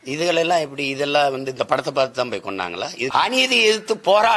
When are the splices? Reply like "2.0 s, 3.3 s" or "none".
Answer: 3.1 s